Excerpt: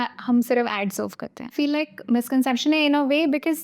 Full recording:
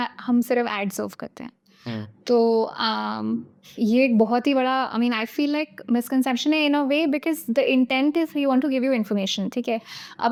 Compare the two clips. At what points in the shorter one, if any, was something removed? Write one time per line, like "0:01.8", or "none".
0:01.5